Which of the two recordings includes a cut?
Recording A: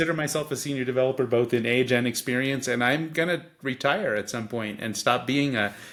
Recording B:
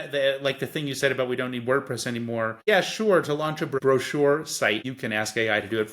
B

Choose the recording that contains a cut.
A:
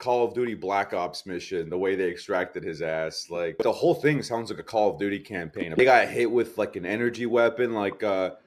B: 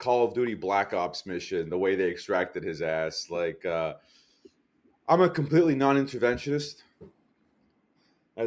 A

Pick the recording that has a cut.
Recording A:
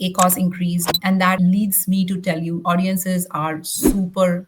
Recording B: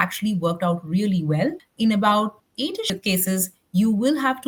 A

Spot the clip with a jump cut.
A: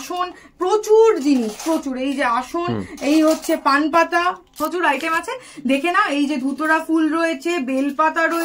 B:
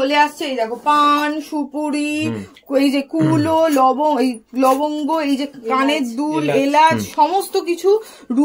A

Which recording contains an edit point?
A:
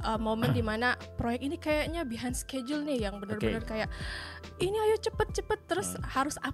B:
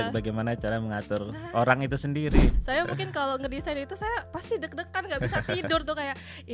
B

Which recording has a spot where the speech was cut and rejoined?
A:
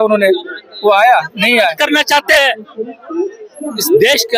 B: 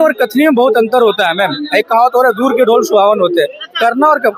A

